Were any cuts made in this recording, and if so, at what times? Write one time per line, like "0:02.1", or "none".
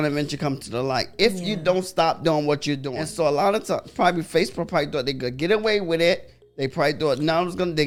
none